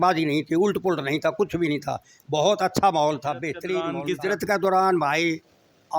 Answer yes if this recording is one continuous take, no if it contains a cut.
no